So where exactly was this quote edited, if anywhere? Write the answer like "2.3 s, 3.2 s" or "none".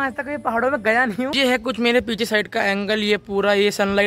1.3 s